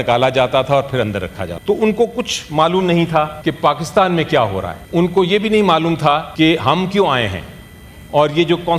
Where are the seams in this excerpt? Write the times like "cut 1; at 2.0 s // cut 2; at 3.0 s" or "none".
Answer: cut 1; at 1.5 s // cut 2; at 3.3 s // cut 3; at 4.8 s // cut 4; at 6.3 s